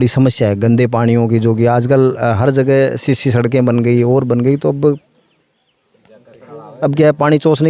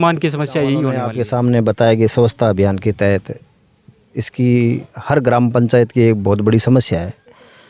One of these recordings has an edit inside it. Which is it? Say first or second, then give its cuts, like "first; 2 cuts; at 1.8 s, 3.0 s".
second; 1 cut; at 1.1 s